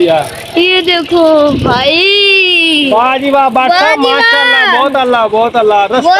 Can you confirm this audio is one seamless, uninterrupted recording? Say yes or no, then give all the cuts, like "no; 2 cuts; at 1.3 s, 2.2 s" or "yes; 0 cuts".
yes; 0 cuts